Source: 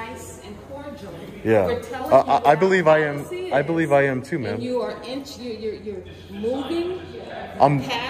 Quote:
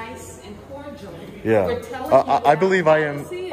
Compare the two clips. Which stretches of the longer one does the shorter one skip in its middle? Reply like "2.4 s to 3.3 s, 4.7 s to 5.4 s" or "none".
none